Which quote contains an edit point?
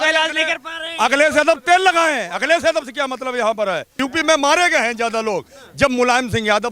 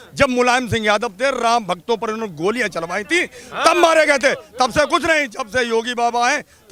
first; 1 cut; at 3.9 s

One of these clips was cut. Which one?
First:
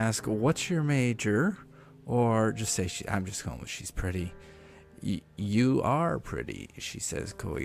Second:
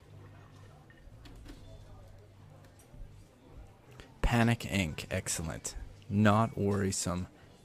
second; 1 cut; at 1.1 s

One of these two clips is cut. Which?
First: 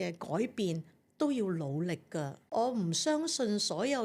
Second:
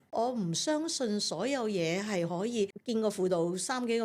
second; 1 cut; at 2.8 s

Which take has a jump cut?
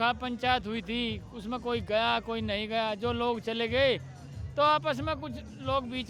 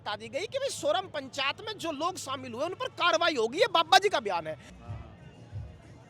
second; 1 cut; at 4.7 s

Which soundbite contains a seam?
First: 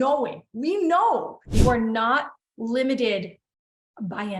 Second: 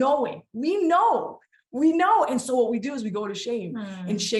first; 1 cut; at 1.6 s

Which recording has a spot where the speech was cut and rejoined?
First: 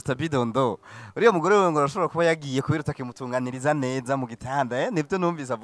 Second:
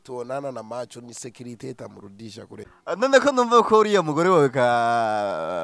second; 1 cut; at 2.6 s

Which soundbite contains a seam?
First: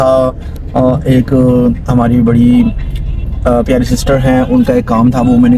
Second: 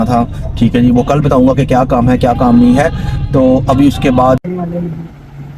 second; 1 cut; at 4.4 s

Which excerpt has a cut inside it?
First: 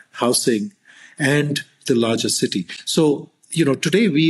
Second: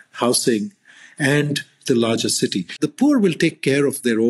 second; 1 cut; at 2.8 s

